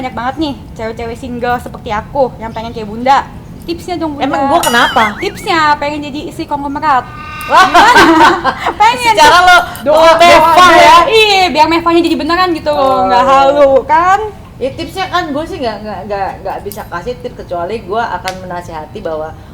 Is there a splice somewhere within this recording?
no; 0 cuts

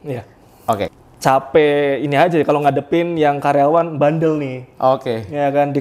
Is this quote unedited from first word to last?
no; 1 cut; at 0.9 s

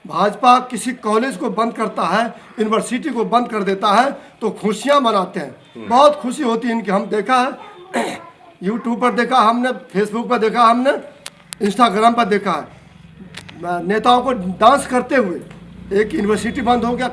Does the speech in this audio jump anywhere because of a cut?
no; 0 cuts

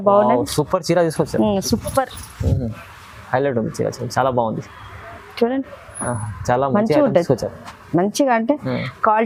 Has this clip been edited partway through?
no; 0 cuts

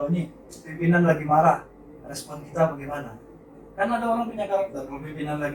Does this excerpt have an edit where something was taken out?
no; 0 cuts

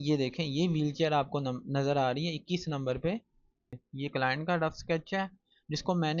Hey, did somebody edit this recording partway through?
yes; 1 cut; at 3.7 s

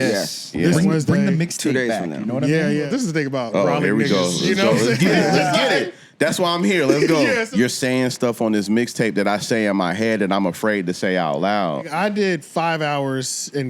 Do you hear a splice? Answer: yes; 3 cuts; at 2.9 s, 7.5 s, 11.9 s

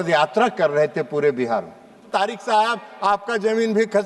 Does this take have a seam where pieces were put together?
yes; 1 cut; at 2.1 s

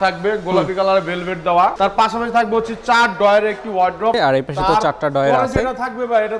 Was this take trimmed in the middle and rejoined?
yes; 2 cuts; at 1.7 s, 4.1 s

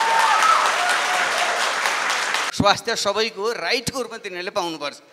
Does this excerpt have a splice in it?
yes; 1 cut; at 2.5 s

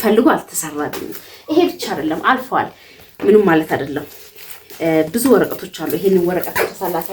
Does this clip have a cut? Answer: no; 0 cuts

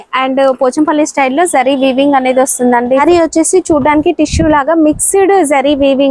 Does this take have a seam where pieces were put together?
yes; 1 cut; at 3.0 s

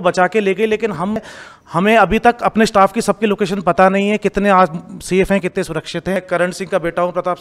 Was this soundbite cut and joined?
yes; 2 cuts; at 1.2 s, 6.2 s

